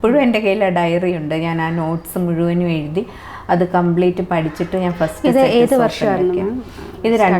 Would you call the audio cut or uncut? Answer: uncut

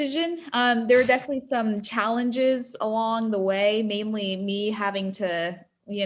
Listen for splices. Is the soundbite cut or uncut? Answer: uncut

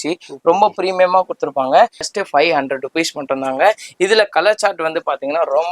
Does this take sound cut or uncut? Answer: cut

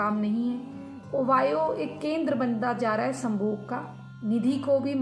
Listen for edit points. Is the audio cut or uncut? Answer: cut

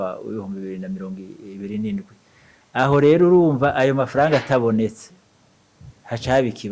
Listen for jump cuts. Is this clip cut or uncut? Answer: uncut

